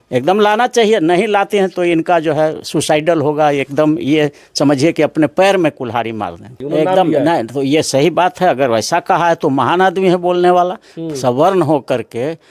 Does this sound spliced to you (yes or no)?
no